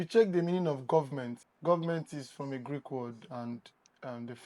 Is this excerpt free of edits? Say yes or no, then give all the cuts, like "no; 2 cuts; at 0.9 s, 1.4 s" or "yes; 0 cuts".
no; 1 cut; at 1.4 s